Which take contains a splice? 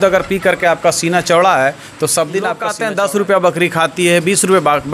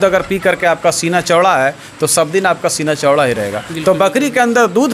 first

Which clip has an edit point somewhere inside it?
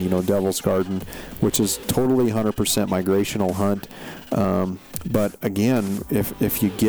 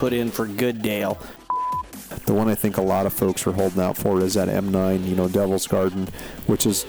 second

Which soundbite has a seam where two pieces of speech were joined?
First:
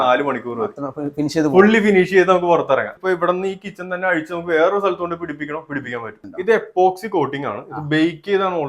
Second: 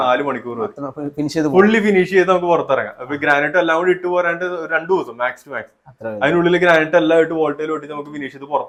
first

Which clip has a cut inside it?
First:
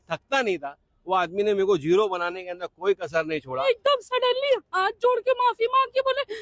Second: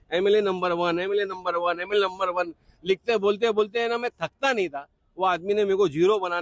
first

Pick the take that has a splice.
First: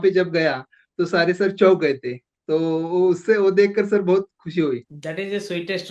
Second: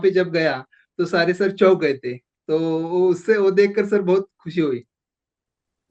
first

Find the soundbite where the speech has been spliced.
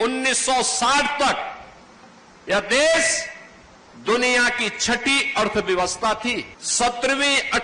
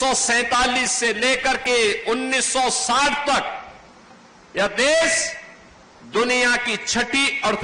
first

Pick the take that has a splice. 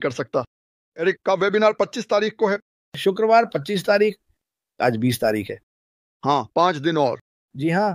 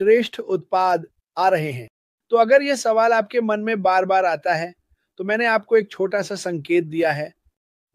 first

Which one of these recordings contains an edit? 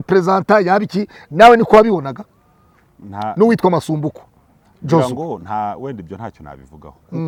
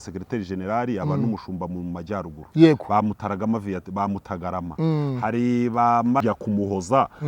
second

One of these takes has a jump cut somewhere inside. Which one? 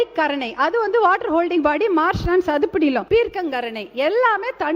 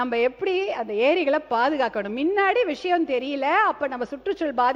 first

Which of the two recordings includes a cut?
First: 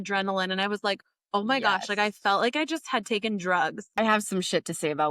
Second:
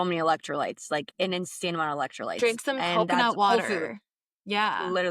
first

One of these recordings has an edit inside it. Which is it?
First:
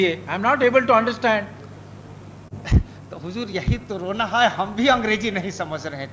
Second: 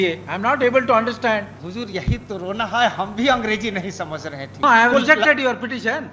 second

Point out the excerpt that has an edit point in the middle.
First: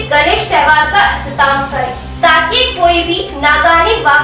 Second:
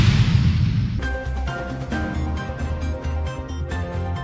second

